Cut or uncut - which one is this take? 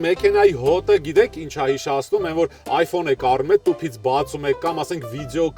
uncut